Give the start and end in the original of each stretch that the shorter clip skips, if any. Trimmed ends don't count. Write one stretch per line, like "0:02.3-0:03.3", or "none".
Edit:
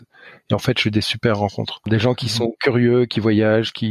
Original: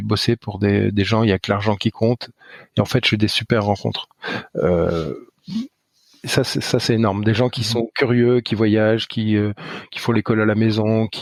0:04.1-0:07.2